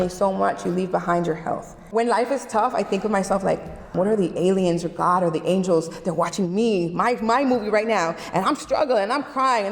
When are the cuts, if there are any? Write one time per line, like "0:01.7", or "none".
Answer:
0:01.7
0:03.8